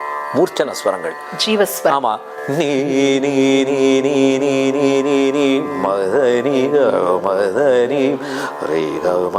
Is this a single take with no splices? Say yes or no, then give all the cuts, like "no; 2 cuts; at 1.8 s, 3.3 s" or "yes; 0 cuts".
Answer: yes; 0 cuts